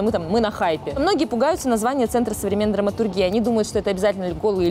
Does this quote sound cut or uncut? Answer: cut